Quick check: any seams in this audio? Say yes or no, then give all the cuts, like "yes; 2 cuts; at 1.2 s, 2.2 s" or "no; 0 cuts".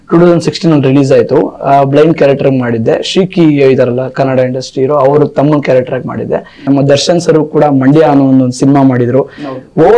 yes; 1 cut; at 6.7 s